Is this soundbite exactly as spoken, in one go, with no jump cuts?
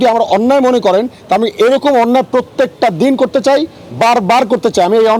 yes; 0 cuts

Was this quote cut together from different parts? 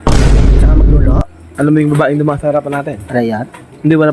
yes; 1 cut; at 1.3 s

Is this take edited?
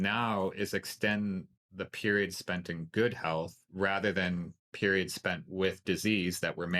yes; 1 cut; at 3.6 s

